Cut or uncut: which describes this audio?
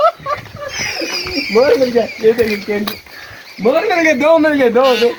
uncut